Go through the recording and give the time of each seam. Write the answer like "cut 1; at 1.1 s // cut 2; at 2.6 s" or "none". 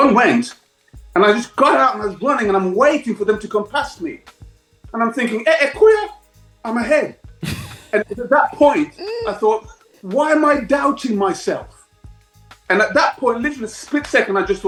none